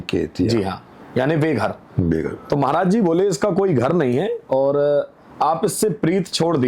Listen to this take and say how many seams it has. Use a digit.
0